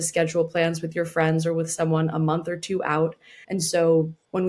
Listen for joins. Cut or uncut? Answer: uncut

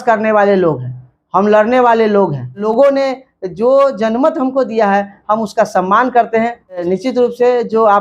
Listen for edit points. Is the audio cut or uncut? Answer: cut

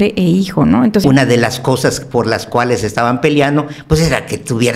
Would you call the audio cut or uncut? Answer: cut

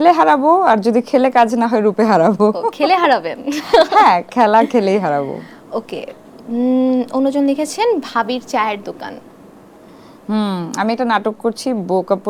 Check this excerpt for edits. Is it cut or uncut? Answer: uncut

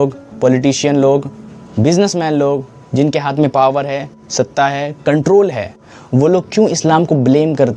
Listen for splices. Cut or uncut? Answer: uncut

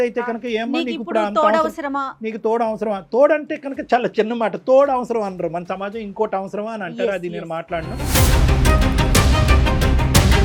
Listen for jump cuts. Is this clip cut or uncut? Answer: uncut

